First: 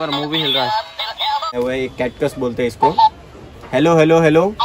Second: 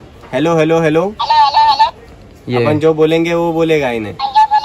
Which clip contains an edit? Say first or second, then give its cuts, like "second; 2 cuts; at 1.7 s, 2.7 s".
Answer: first; 1 cut; at 1.5 s